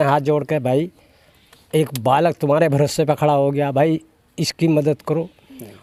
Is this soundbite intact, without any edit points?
yes; 0 cuts

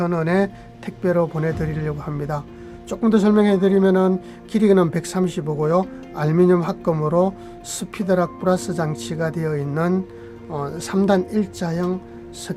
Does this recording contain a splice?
no; 0 cuts

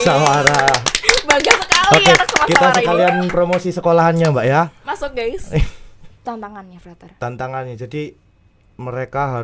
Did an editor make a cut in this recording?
yes; 1 cut; at 6.2 s

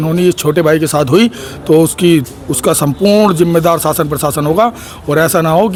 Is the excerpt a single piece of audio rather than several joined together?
yes; 0 cuts

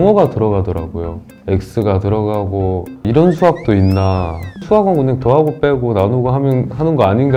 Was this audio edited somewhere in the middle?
no; 0 cuts

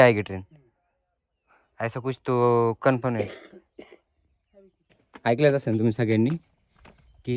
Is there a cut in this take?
yes; 1 cut; at 4.8 s

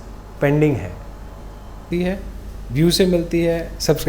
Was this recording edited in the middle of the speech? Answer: yes; 1 cut; at 1.9 s

